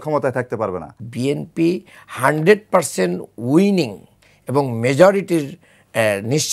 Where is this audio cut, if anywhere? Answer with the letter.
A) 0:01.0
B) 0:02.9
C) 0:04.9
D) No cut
A